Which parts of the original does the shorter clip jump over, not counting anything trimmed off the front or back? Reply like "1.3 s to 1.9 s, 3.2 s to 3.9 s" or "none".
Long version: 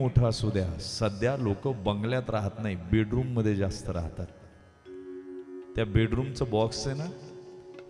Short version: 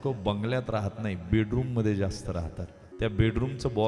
4.4 s to 5.6 s